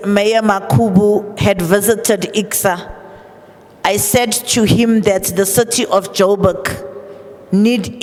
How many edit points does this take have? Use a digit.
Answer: 0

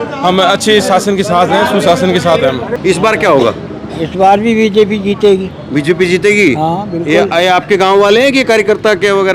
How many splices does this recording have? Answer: 1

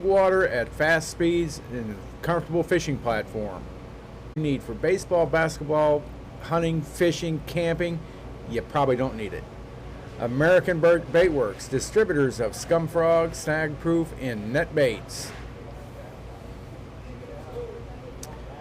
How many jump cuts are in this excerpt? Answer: 1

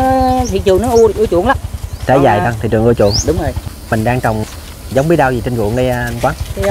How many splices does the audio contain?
1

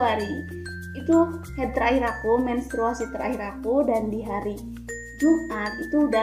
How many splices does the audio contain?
0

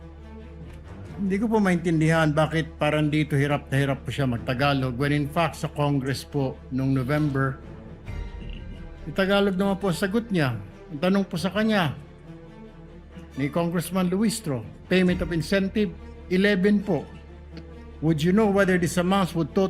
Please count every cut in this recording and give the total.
1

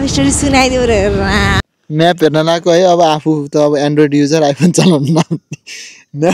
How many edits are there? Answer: 1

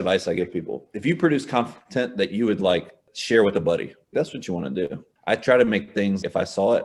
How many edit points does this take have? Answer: 2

